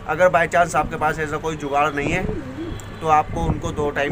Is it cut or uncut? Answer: uncut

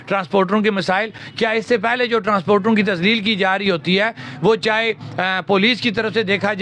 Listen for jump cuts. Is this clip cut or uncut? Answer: uncut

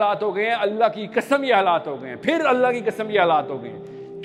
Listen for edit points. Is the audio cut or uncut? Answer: uncut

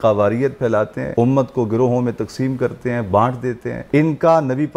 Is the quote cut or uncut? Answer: cut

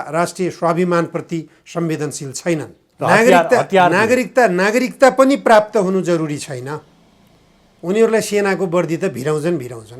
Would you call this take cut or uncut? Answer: cut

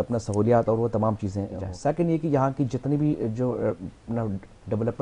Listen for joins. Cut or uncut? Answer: cut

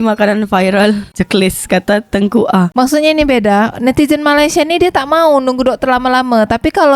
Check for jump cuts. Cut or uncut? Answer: uncut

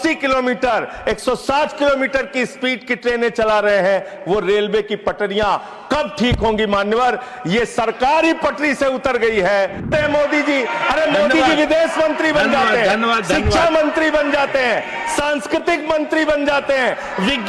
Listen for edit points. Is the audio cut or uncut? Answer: cut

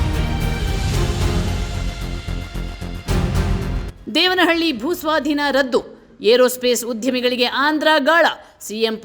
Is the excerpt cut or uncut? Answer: cut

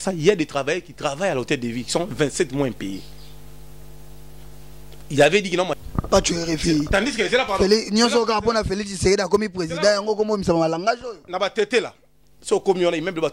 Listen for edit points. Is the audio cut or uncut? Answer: cut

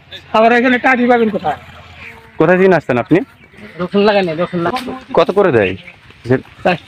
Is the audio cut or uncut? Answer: cut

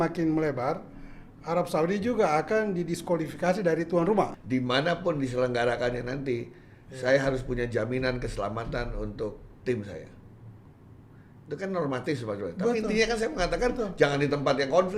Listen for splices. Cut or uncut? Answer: cut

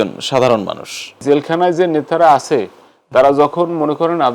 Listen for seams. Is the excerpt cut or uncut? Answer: cut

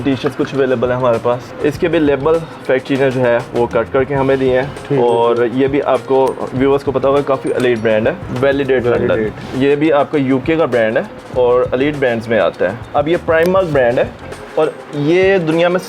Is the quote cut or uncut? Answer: cut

